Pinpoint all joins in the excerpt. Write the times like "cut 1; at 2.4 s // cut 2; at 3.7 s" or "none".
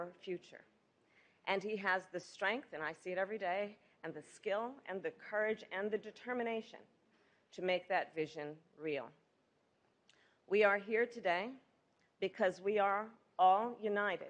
cut 1; at 3.1 s // cut 2; at 8.0 s // cut 3; at 13.0 s